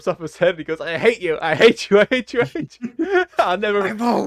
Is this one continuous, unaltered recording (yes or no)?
yes